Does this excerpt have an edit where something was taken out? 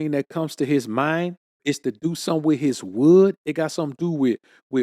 yes; 1 cut; at 1.4 s

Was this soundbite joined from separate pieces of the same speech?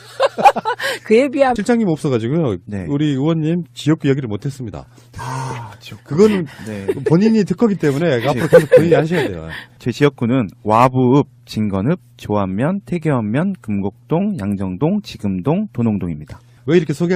yes; 1 cut; at 4.9 s

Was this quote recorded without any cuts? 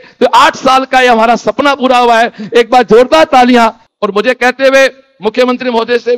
no; 1 cut; at 3.8 s

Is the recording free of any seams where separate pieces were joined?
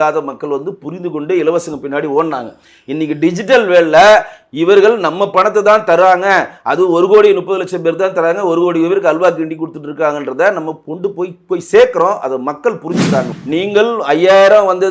no; 1 cut; at 13.3 s

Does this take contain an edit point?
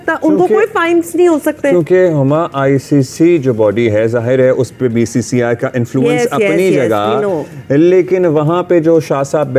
no; 0 cuts

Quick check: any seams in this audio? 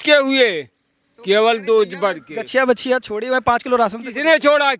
no; 0 cuts

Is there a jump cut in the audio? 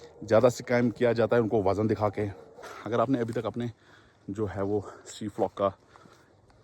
yes; 1 cut; at 2.7 s

